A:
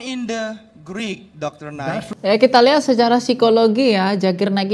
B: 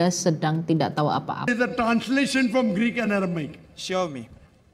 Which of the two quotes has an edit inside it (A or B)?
B